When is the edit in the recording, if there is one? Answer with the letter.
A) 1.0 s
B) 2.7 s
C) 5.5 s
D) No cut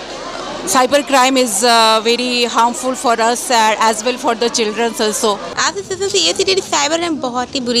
C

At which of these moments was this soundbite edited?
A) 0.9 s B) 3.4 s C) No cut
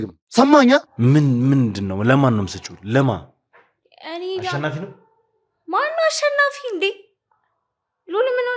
A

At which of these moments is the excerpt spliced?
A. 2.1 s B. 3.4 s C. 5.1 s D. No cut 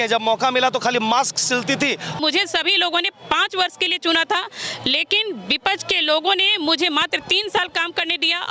A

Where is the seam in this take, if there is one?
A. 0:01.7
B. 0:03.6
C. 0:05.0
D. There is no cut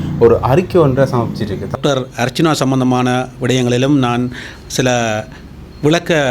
A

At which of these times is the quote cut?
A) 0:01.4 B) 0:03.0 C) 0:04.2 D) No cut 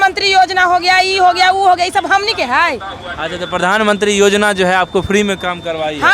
D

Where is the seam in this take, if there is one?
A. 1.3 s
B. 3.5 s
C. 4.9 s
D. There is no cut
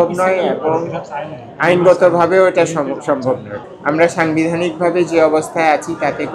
B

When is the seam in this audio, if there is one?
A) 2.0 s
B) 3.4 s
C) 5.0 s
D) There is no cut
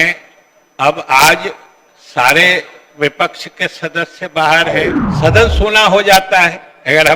C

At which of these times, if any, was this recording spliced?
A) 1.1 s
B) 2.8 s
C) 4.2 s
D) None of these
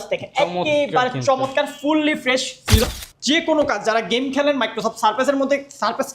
B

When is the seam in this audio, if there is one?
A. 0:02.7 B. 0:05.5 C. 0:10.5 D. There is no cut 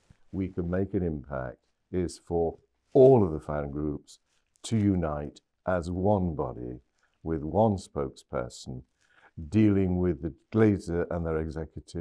D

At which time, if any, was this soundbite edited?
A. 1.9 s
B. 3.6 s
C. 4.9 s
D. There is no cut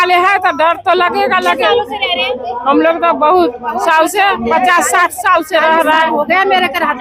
D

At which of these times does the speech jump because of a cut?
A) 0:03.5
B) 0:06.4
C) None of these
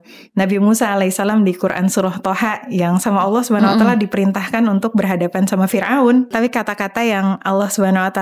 B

